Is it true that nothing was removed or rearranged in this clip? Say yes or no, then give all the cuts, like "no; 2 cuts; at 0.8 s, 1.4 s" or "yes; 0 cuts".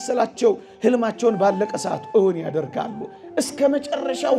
yes; 0 cuts